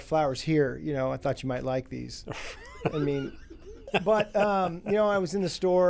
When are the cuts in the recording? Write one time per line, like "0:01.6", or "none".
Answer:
0:03.8